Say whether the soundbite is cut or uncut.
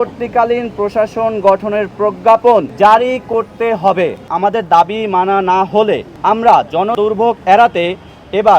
cut